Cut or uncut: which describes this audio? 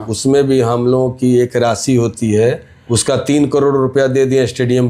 cut